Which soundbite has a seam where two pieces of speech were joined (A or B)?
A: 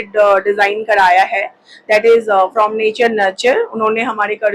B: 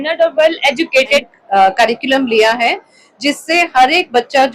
B